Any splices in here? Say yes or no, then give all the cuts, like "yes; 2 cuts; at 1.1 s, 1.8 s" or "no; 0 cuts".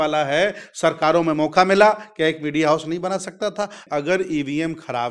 yes; 1 cut; at 3.8 s